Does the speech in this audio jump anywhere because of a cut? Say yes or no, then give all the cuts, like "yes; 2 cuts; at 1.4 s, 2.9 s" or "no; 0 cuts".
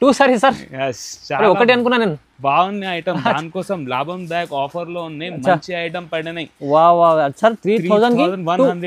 no; 0 cuts